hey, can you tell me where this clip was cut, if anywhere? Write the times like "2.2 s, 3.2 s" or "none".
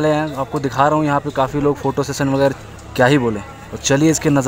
2.5 s